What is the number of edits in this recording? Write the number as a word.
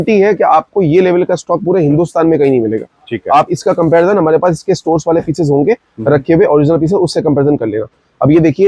zero